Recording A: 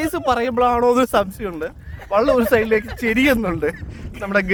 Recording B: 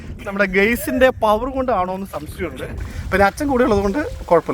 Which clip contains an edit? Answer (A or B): B